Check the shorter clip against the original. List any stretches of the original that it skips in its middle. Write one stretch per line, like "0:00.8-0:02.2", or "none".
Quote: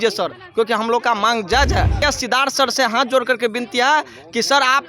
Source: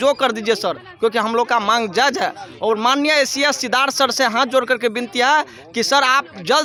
0:02.4-0:03.4